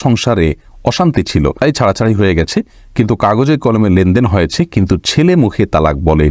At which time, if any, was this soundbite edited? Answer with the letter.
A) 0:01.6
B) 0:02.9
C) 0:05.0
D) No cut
A